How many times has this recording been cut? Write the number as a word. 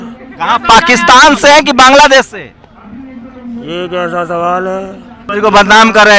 one